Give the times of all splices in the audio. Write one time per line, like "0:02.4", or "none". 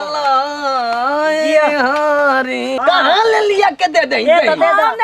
0:02.8